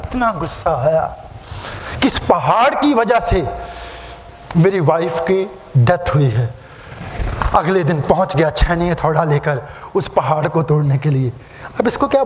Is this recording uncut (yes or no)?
yes